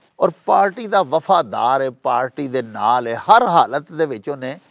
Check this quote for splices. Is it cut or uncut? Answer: uncut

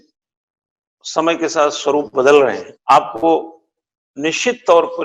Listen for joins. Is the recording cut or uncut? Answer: cut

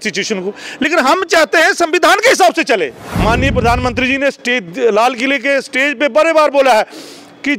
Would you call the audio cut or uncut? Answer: cut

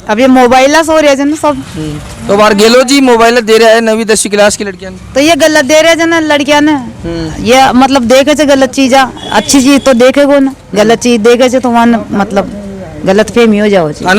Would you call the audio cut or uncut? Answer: uncut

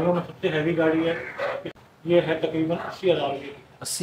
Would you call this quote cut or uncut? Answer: cut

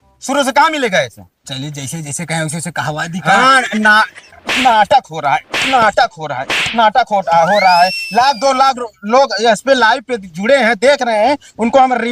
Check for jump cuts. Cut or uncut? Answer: uncut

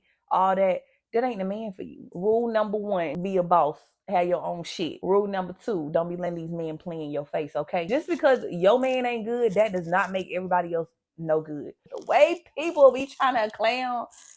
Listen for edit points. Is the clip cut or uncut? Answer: cut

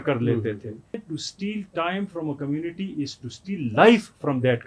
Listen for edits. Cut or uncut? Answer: cut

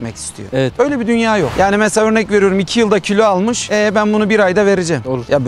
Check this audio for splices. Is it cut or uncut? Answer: cut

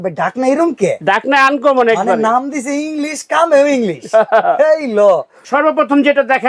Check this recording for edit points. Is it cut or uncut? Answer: cut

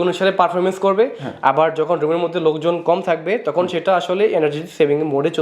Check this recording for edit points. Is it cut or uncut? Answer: uncut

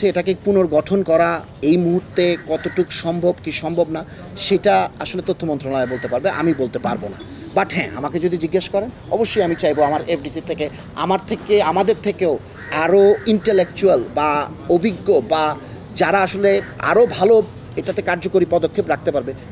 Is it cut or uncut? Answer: uncut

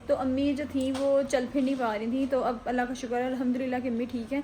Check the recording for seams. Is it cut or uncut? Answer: uncut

